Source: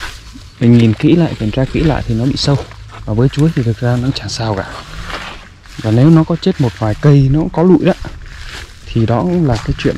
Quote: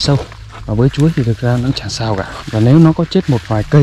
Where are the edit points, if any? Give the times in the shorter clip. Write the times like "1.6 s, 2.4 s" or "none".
2.4 s